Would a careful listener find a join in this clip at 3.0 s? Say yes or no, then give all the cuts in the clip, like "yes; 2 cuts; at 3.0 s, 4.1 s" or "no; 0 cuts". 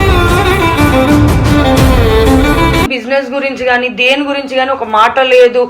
yes; 1 cut; at 3.0 s